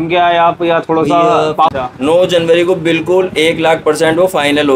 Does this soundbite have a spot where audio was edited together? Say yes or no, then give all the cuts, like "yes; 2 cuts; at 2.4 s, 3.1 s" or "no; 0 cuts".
yes; 1 cut; at 1.7 s